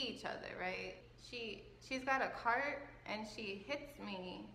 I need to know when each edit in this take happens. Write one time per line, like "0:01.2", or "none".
0:01.0